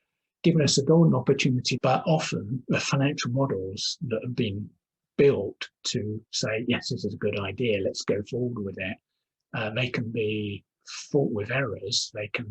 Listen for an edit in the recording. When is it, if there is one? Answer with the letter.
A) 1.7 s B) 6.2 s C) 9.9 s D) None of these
A